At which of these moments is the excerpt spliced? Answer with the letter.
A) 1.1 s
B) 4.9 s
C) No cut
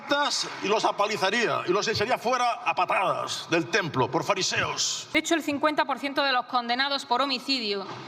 B